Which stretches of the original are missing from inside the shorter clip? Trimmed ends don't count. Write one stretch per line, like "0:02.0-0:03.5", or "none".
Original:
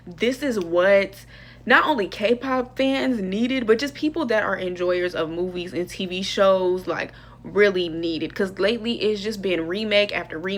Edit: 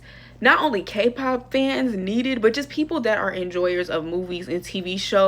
none